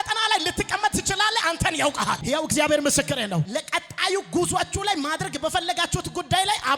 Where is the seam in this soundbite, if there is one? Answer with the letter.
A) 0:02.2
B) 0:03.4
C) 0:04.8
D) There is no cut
A